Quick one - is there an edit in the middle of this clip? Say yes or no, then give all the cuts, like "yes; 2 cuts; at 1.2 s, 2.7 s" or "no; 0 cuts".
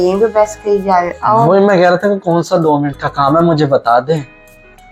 no; 0 cuts